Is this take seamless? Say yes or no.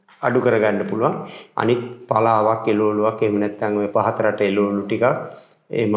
yes